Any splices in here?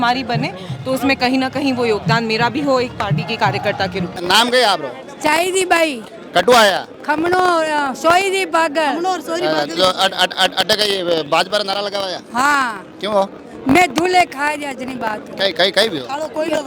no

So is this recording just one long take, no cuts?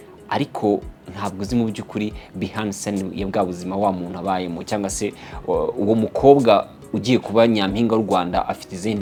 yes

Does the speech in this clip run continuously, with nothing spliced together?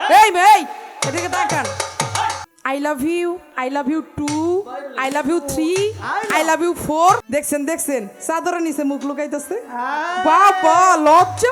no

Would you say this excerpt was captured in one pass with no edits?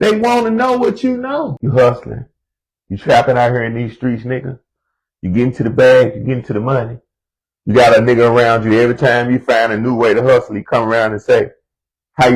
no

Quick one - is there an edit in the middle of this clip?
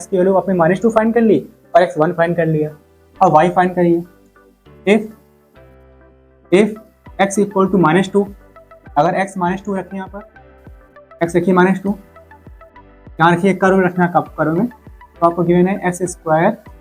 no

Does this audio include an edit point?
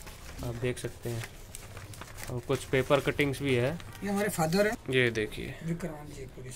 yes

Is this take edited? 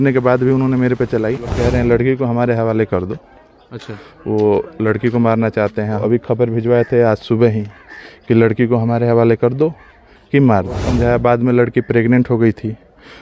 yes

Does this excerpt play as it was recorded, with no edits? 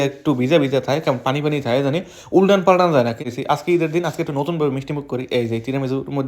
no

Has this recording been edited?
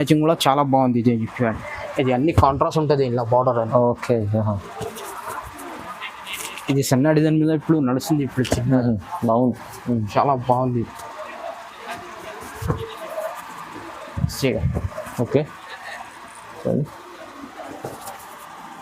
no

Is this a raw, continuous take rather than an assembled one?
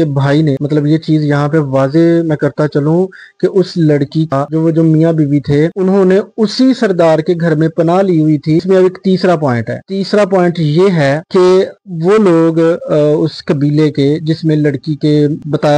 no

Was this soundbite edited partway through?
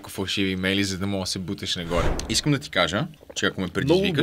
yes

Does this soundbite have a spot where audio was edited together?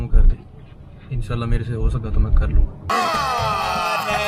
no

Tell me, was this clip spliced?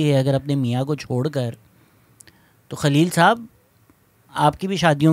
no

